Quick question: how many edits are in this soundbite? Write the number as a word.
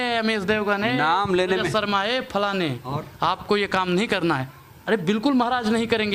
zero